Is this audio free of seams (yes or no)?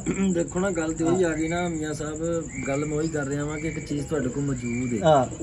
yes